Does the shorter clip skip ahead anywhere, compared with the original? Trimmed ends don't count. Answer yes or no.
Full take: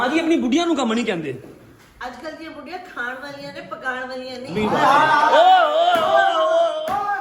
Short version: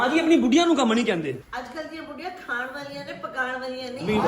yes